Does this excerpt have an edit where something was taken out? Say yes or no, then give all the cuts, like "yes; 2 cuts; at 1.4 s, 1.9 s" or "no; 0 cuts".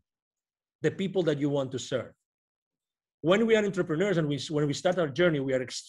no; 0 cuts